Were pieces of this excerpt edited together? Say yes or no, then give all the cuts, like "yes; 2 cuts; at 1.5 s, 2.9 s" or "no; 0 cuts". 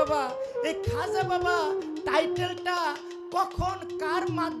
no; 0 cuts